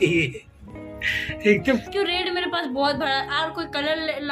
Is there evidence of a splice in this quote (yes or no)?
yes